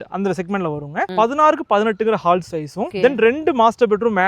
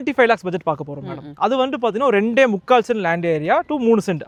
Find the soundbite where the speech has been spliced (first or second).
first